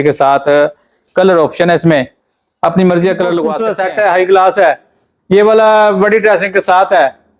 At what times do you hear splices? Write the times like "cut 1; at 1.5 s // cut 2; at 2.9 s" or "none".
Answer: cut 1; at 3.7 s